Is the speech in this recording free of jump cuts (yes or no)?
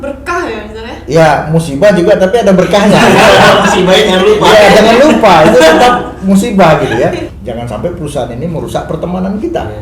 no